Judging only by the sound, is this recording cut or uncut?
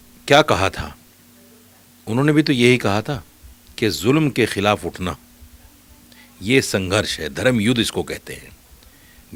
uncut